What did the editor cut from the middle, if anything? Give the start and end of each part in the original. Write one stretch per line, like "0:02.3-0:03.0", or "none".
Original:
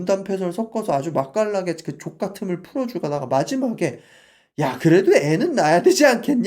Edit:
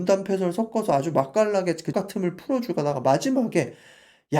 0:01.8-0:02.1